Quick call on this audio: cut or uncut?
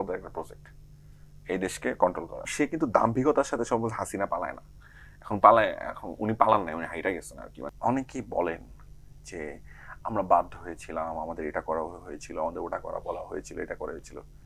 cut